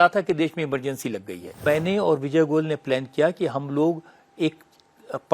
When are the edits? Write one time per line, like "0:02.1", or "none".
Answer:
0:01.6